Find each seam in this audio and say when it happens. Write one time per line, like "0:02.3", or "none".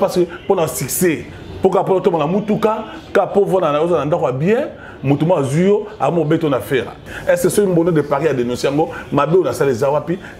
0:07.0